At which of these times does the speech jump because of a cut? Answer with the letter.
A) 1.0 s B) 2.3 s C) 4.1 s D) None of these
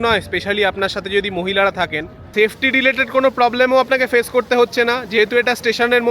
B